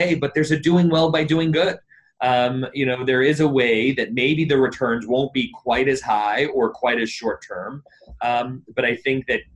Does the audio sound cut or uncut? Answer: uncut